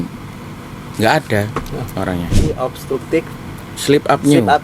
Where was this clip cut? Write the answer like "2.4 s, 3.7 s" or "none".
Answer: 2.4 s